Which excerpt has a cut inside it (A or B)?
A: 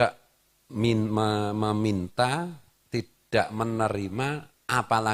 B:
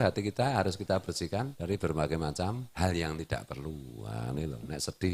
B